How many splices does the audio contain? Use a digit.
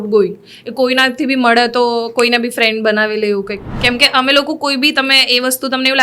1